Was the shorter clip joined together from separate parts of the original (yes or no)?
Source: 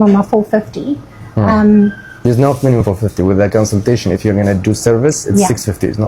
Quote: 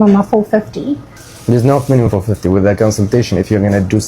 yes